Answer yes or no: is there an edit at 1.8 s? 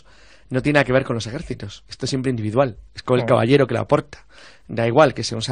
no